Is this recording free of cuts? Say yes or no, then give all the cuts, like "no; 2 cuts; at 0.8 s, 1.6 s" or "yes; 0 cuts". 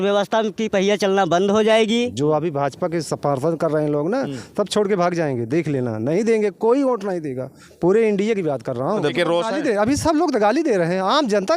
no; 2 cuts; at 2.1 s, 9.1 s